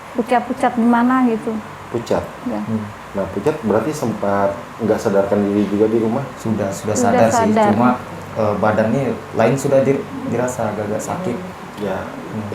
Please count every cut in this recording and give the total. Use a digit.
3